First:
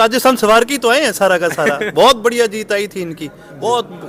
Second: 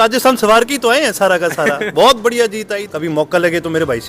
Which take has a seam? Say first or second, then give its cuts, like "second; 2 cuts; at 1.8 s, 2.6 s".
second; 1 cut; at 2.9 s